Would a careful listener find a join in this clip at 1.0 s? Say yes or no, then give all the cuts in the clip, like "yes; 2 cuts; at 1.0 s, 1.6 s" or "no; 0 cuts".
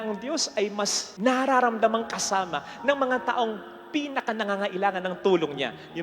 yes; 1 cut; at 1.0 s